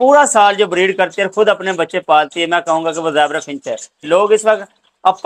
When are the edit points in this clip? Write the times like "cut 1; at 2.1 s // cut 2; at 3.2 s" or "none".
cut 1; at 4.0 s

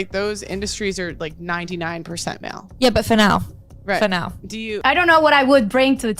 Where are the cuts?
cut 1; at 4.6 s

